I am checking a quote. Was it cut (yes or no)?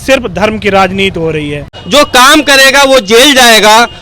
yes